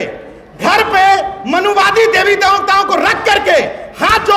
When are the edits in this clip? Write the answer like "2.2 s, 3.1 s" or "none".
none